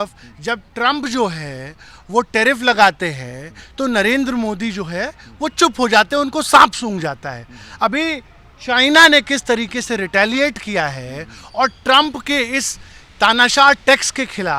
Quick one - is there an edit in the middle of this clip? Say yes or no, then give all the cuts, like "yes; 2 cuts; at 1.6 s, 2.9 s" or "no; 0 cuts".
no; 0 cuts